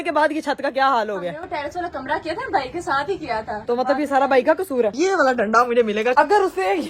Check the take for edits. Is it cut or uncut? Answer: cut